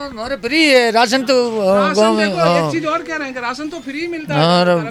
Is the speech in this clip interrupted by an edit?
no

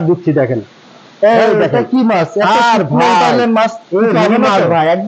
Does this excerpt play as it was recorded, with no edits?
yes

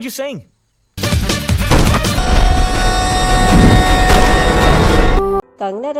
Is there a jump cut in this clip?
no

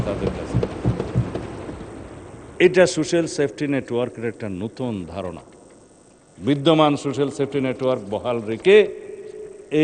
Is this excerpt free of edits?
yes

